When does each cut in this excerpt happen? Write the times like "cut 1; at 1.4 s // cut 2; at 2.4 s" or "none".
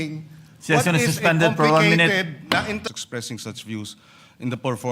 cut 1; at 3.0 s